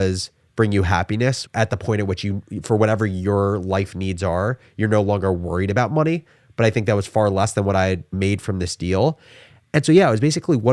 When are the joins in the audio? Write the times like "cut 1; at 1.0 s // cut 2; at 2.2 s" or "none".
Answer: cut 1; at 1.4 s